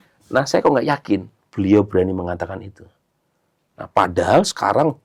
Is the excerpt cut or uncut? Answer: uncut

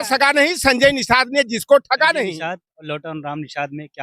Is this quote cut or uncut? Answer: cut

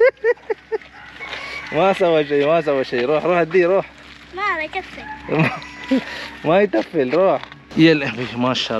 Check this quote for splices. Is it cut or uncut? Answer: cut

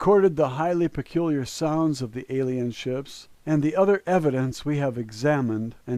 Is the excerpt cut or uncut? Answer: cut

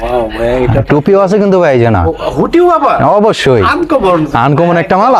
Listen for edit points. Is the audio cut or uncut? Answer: uncut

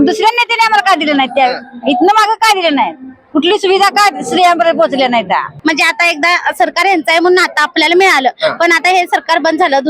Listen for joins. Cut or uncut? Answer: cut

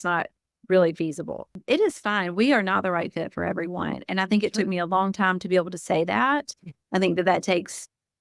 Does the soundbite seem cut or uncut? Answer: cut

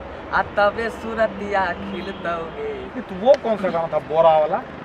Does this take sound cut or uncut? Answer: cut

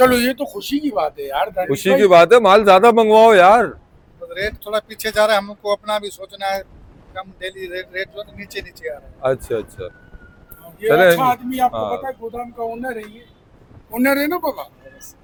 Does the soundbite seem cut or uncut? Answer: uncut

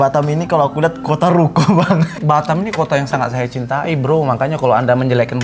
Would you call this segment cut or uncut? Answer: cut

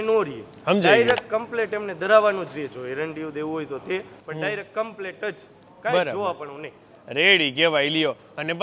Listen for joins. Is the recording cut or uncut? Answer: uncut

